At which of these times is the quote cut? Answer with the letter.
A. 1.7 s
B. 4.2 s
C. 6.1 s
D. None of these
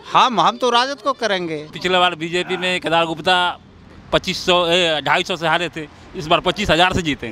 A